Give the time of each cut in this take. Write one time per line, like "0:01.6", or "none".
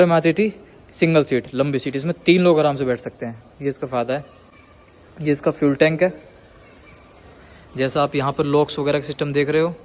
none